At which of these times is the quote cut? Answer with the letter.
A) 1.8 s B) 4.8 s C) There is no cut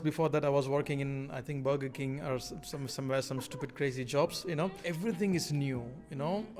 B